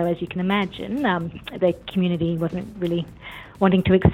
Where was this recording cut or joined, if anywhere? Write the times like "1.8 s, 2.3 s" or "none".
none